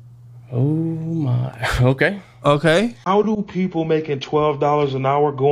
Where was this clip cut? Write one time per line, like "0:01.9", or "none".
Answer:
0:03.0